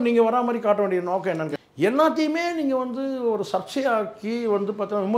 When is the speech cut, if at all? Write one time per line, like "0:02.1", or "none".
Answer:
0:01.5